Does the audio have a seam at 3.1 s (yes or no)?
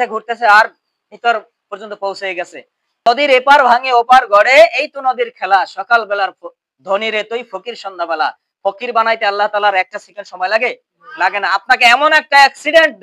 yes